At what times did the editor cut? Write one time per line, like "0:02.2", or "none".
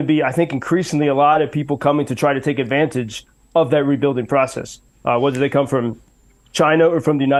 none